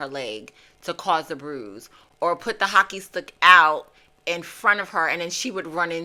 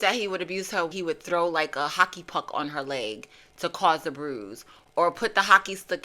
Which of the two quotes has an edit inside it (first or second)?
second